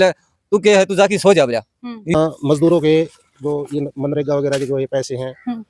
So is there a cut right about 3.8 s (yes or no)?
no